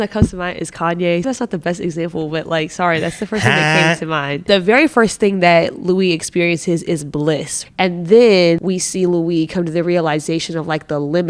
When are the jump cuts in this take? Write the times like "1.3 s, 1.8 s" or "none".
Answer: 1.2 s, 4.4 s, 7.6 s, 8.6 s